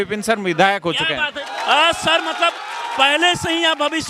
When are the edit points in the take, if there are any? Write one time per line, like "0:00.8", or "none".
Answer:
0:01.3